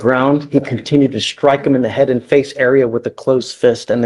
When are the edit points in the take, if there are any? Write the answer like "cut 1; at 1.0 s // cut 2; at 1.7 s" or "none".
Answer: none